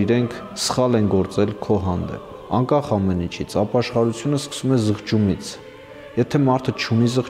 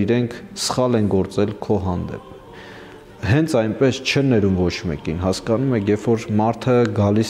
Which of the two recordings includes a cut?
first; 1 cut; at 2.4 s

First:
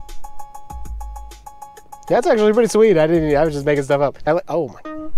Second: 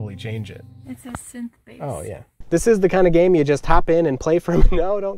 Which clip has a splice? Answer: second; 1 cut; at 2.4 s

